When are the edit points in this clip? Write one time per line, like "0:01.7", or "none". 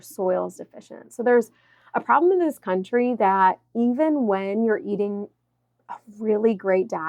none